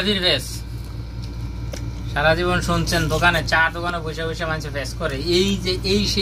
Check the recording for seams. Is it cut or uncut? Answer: uncut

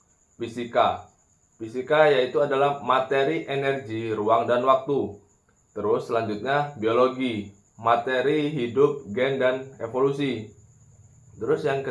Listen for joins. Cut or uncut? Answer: uncut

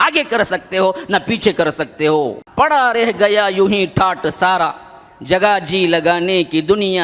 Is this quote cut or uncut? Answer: cut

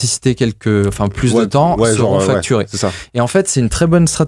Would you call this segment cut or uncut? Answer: uncut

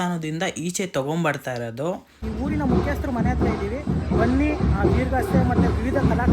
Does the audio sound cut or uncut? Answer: cut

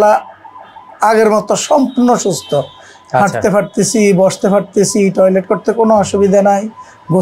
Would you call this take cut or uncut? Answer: uncut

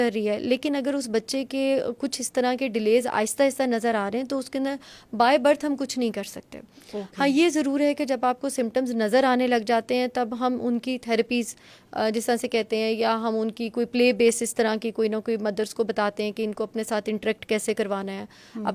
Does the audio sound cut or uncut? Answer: uncut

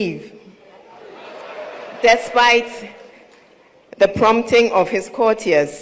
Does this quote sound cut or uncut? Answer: uncut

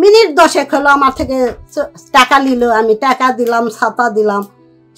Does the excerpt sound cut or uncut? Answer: uncut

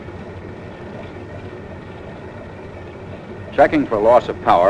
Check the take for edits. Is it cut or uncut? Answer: uncut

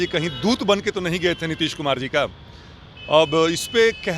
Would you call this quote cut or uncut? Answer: uncut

